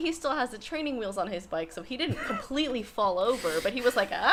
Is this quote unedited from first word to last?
yes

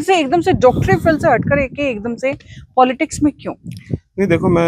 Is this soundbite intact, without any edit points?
yes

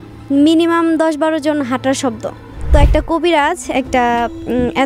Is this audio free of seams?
no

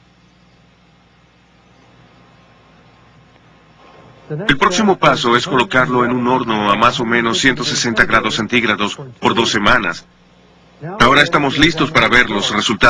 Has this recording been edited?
yes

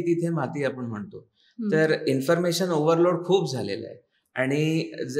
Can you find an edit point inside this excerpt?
no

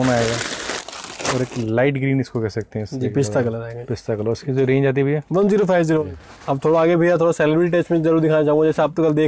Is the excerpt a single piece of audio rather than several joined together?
yes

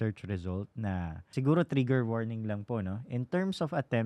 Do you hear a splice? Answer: yes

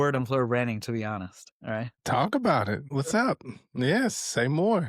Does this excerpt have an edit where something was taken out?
yes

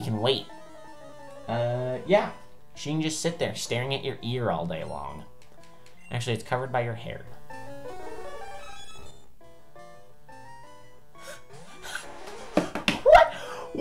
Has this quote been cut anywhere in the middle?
no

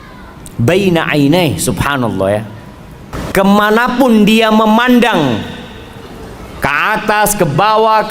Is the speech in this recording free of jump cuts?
no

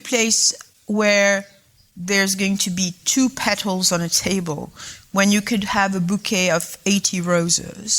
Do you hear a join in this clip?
no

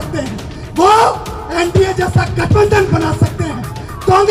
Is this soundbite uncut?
yes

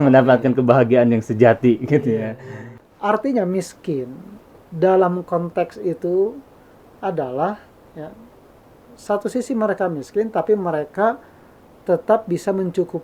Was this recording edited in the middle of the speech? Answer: yes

